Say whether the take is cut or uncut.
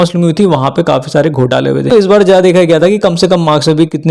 cut